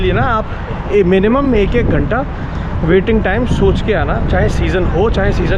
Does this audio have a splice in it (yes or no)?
no